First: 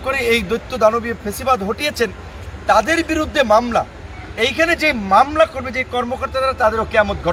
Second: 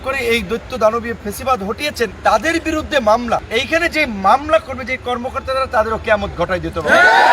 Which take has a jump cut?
second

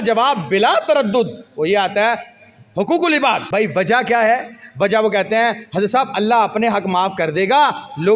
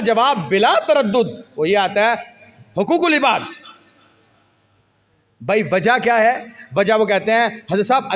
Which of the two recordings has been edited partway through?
first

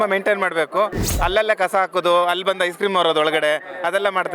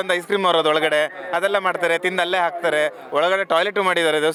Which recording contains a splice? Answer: first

